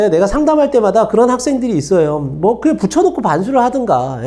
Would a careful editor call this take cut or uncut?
uncut